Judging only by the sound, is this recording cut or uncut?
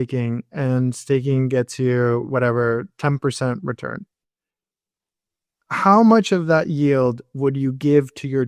uncut